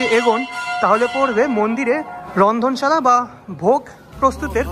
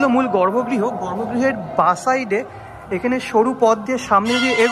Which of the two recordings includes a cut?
first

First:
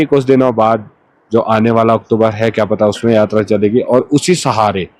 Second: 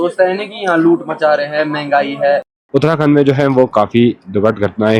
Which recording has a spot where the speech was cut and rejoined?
second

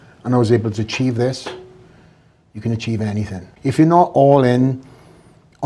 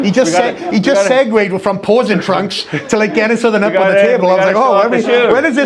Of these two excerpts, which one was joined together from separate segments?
first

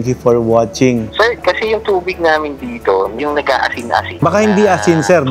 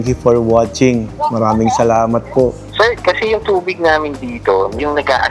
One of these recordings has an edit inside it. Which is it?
first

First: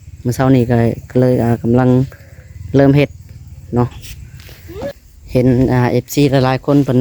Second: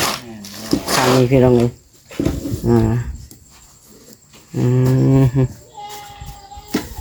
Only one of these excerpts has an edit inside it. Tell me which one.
first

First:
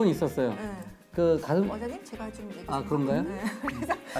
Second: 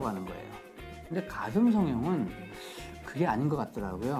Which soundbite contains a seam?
second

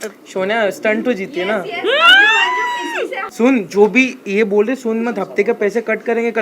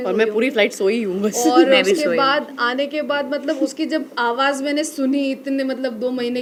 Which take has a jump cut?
first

